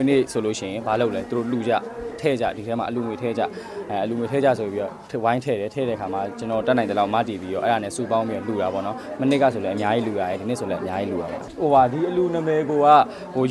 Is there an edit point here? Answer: no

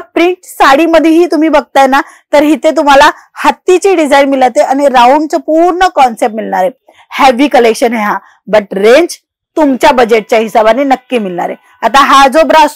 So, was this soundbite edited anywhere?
no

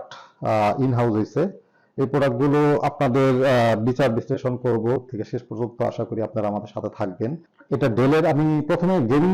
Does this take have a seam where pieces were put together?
yes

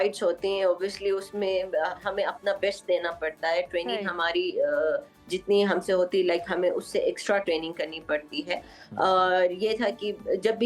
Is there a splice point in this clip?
no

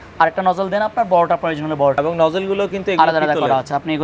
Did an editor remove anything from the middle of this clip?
yes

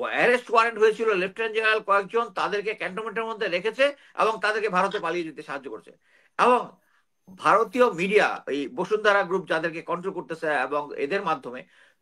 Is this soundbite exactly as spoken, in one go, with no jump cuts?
yes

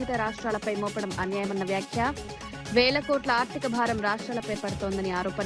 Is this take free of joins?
yes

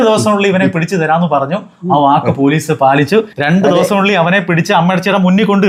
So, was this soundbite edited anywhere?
no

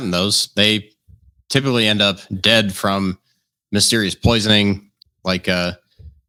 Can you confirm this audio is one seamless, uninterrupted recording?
yes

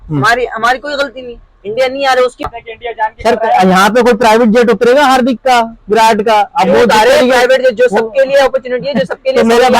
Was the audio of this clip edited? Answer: yes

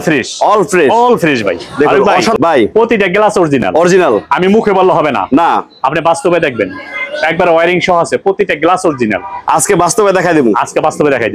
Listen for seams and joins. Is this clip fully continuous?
no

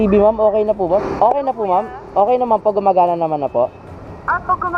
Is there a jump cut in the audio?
no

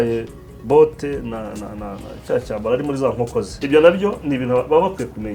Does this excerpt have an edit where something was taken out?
yes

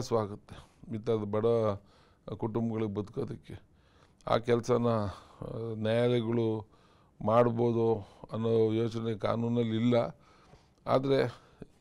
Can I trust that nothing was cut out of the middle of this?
no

